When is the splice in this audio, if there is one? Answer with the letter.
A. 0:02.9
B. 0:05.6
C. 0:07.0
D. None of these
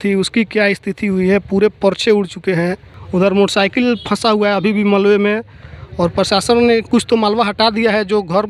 A